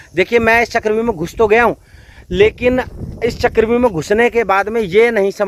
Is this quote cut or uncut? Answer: uncut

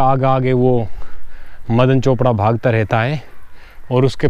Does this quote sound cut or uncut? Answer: uncut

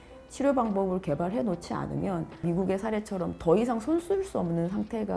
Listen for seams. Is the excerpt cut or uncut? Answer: uncut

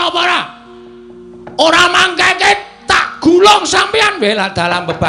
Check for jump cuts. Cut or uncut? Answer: uncut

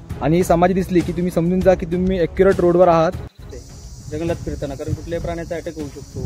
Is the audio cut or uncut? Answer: cut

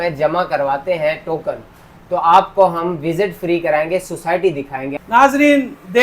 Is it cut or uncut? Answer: cut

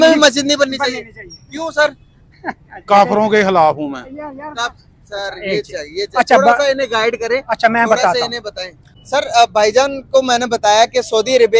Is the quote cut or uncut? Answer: cut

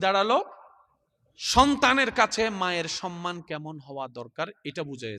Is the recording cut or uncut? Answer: uncut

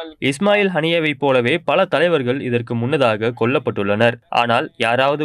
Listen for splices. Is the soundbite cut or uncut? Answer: cut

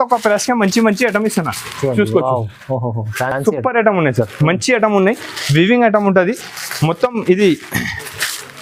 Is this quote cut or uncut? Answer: uncut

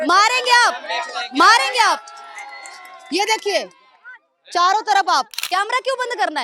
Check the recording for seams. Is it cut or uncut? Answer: cut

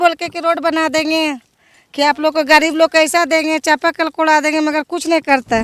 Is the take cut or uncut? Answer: uncut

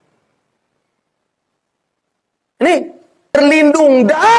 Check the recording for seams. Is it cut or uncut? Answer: cut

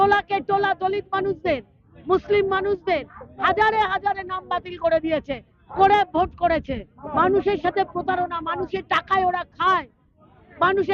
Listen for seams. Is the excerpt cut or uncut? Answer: cut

